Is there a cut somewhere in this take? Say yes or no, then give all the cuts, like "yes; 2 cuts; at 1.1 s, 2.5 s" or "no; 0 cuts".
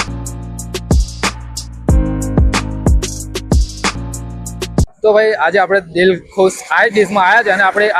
no; 0 cuts